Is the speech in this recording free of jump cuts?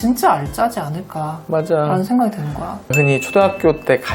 no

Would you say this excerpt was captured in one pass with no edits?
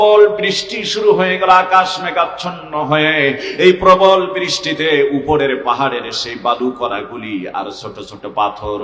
yes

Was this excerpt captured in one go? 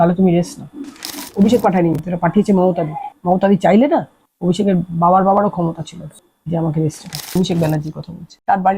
no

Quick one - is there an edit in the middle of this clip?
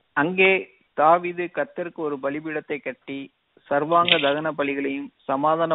no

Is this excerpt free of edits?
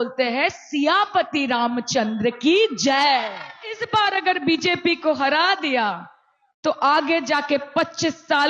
no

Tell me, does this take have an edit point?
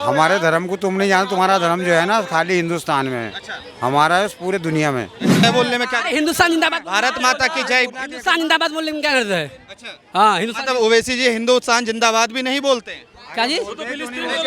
yes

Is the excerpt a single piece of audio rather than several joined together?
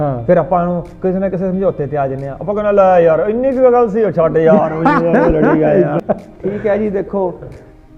no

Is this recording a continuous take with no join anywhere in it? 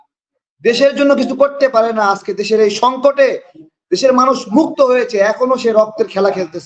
yes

